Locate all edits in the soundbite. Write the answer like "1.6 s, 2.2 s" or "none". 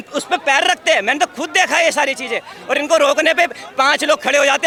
none